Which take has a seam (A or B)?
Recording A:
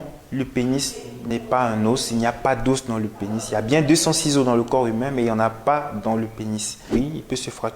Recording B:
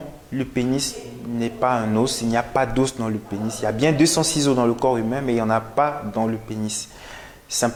A